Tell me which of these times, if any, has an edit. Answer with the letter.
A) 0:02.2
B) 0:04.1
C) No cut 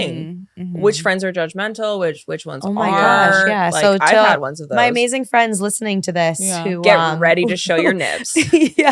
C